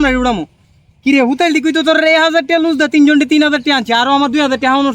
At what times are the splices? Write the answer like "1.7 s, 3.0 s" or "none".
none